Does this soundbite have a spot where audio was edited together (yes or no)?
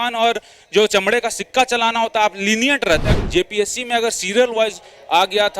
yes